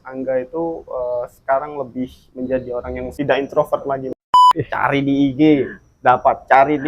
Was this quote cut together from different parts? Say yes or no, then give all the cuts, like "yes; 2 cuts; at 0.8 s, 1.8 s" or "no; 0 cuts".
yes; 2 cuts; at 3.1 s, 4.3 s